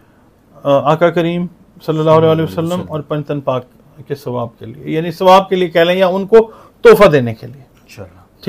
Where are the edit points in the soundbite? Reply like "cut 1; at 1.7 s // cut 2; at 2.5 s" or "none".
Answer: none